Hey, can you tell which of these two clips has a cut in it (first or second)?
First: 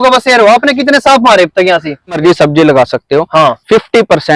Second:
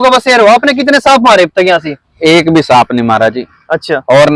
first